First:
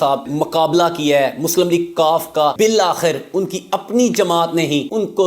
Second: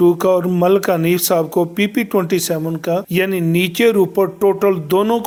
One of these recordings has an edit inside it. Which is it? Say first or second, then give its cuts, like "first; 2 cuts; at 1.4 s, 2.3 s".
first; 1 cut; at 2.5 s